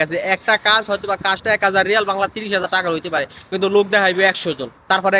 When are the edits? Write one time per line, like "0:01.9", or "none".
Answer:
none

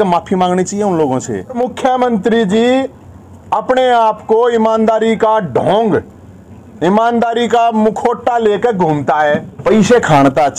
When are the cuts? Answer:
0:01.5
0:09.5

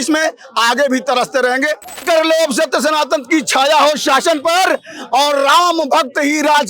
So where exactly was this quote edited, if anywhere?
0:02.0

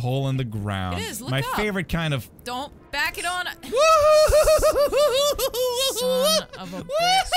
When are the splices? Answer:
0:02.8

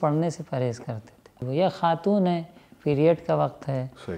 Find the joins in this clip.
0:01.4

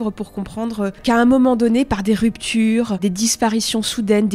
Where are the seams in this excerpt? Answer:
0:01.0
0:03.0

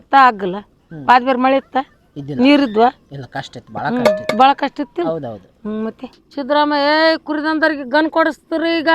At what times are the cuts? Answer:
0:06.0

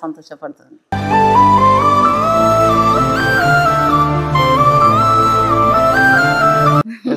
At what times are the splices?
none

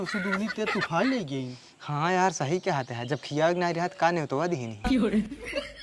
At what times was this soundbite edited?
0:04.8

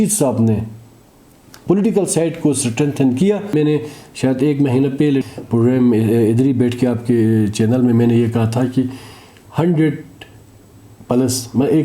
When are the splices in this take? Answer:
0:03.5

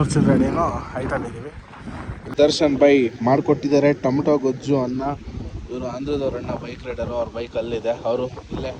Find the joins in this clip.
0:02.3

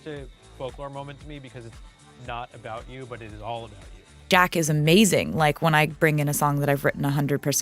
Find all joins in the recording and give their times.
0:04.1

